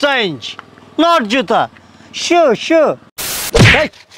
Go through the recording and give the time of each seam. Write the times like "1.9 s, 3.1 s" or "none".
3.1 s